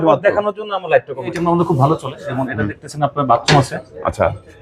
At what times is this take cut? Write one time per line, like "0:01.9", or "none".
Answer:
0:01.4

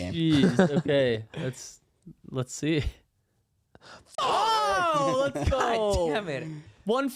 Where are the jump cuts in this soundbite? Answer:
none

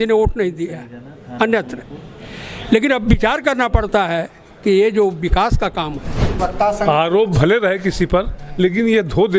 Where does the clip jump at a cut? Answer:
0:06.4

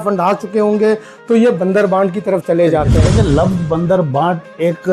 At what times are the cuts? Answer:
0:03.0

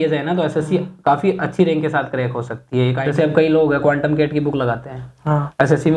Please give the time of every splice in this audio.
0:03.0

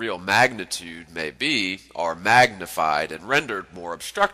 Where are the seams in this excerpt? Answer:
none

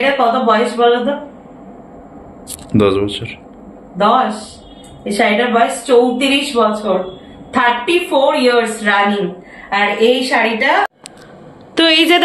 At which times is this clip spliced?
0:11.0

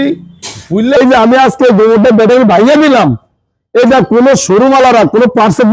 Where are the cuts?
0:01.0

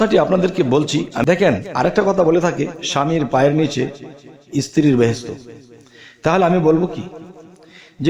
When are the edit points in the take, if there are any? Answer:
0:01.1

